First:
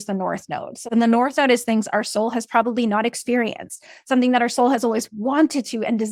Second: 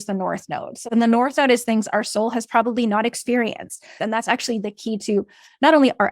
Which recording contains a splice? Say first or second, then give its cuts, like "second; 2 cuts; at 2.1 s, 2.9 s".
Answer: second; 1 cut; at 4.0 s